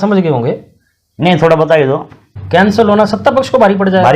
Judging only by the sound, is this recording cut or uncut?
cut